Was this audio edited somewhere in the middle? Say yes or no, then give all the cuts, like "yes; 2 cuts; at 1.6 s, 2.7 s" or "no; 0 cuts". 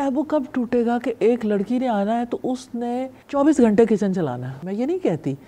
yes; 2 cuts; at 3.2 s, 4.5 s